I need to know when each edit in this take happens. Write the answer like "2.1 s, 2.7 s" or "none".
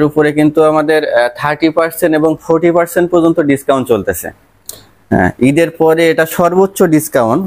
none